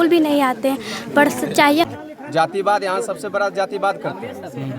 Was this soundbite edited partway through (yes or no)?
yes